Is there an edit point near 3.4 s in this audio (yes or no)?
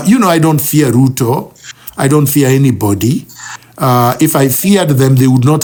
no